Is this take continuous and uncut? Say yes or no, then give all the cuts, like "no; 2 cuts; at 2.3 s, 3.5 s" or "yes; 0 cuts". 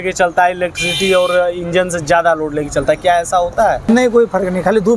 no; 1 cut; at 3.8 s